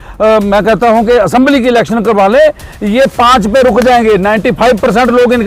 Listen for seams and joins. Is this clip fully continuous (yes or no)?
yes